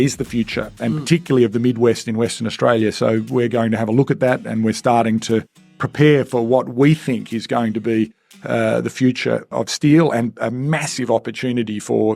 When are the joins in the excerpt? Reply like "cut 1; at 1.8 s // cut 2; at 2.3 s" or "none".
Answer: cut 1; at 9.5 s